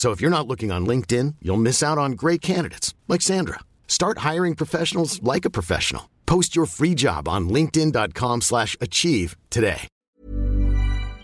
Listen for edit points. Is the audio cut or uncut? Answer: cut